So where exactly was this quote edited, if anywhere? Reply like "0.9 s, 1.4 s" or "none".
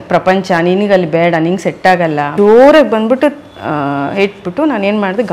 2.3 s